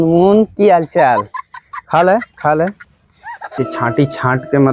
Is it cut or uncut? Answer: cut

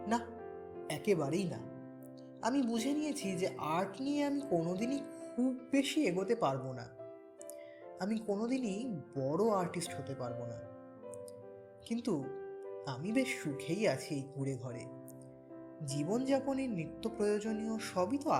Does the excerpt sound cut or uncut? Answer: uncut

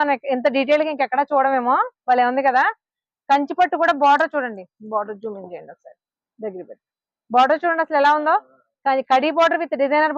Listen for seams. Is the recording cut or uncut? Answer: uncut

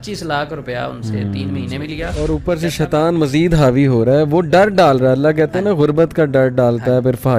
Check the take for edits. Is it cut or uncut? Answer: cut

